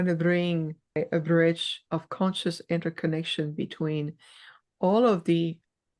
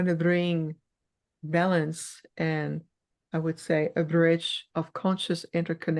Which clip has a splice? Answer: first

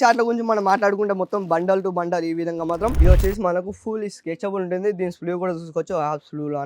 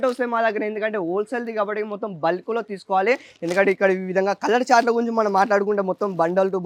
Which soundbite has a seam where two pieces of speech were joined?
first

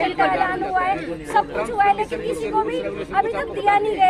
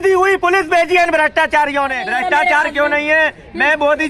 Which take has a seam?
second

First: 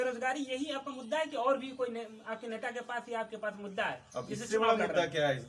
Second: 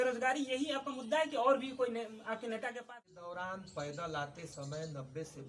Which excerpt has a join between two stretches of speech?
second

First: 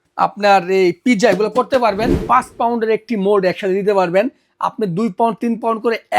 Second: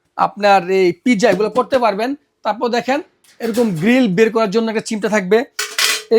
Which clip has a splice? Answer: first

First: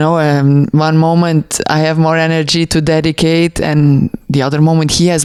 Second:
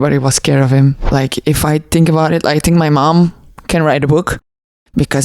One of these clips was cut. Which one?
second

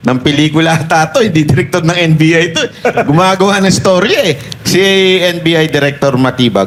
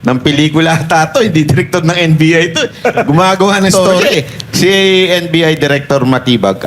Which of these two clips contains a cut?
second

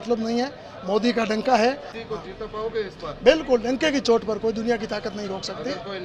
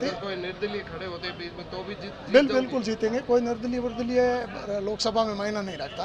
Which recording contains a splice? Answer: first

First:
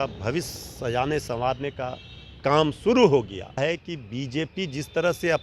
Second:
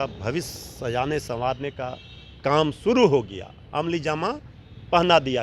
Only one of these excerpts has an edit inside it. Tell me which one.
first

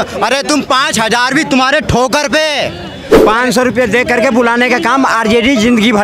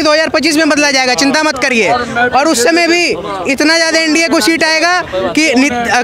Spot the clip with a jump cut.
first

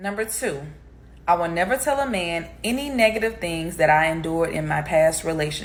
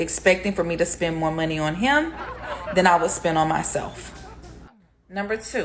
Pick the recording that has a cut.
second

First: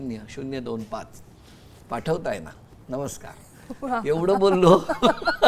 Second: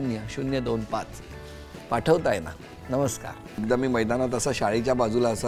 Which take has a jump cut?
second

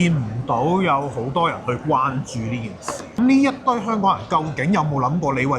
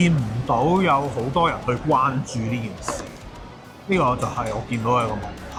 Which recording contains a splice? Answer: first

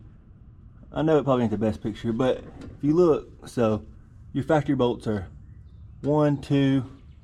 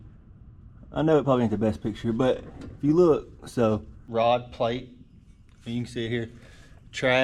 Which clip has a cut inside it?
second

